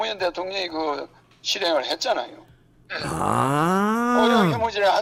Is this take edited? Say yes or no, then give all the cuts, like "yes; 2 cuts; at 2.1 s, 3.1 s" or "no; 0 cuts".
no; 0 cuts